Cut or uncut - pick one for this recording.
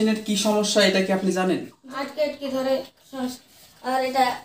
cut